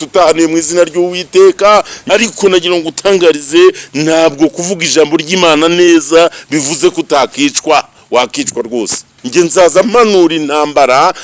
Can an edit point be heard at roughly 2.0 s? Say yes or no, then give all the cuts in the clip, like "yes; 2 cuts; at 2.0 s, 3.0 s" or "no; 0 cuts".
yes; 2 cuts; at 2.0 s, 9.2 s